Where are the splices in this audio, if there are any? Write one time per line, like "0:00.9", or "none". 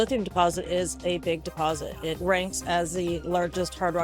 none